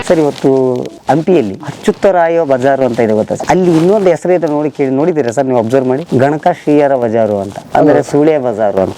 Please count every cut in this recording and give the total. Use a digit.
3